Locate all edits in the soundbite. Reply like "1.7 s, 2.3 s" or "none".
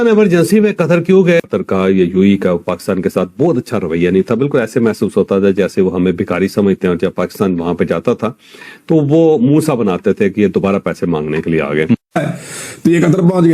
1.5 s, 12.3 s